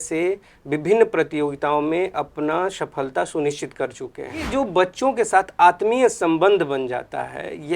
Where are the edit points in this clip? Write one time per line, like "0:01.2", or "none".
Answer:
0:04.5